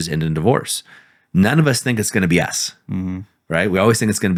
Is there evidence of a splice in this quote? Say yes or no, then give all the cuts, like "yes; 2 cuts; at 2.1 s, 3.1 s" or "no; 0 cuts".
no; 0 cuts